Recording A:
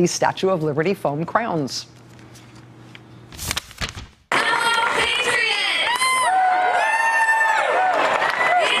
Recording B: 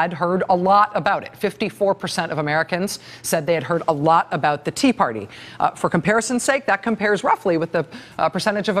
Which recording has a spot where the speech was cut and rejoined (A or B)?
B